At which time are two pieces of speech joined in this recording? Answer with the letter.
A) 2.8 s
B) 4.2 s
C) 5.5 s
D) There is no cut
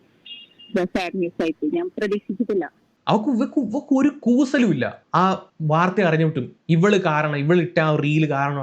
A